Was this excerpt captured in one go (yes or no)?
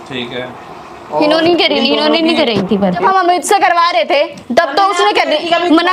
no